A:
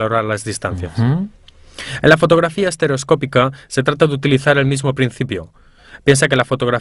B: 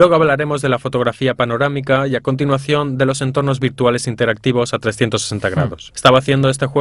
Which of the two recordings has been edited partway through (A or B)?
A